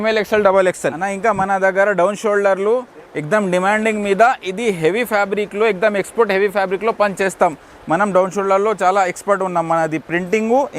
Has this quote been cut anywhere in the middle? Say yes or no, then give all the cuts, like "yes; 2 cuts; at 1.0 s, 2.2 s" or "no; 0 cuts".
yes; 1 cut; at 1.0 s